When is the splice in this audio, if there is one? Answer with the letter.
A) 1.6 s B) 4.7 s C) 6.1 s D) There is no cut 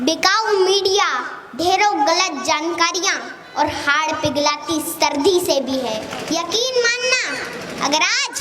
C